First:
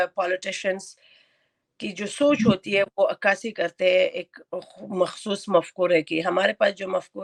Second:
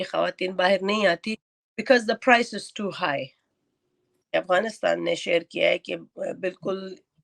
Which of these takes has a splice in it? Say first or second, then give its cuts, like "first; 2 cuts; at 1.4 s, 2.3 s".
second; 1 cut; at 4.2 s